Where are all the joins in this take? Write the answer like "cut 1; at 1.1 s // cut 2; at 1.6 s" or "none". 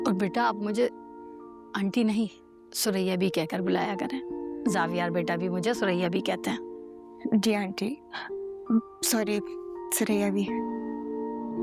none